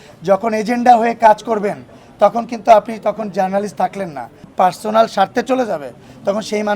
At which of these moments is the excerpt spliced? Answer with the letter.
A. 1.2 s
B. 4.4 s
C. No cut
B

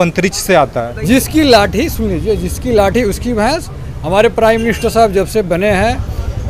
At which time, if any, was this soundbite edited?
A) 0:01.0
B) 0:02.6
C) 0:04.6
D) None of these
A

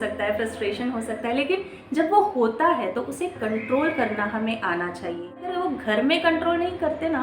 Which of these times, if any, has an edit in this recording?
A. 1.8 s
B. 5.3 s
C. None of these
B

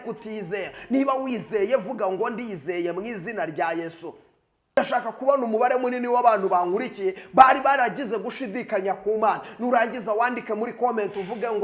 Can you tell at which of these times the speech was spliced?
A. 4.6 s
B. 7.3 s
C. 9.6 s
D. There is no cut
A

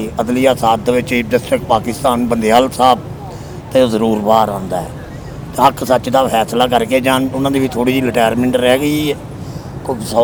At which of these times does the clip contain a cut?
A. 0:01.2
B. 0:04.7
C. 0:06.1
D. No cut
D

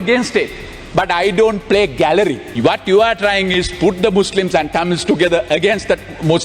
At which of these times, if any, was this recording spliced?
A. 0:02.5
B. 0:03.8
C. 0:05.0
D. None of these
A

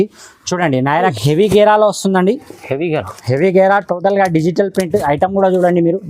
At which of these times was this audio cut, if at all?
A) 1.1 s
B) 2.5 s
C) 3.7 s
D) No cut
A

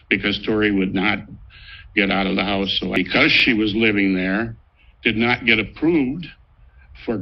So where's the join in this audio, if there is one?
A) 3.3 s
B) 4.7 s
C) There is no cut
A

